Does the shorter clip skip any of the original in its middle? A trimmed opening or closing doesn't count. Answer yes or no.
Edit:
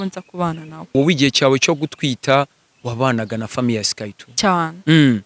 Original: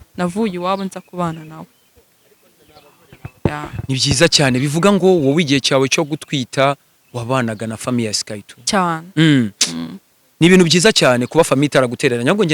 yes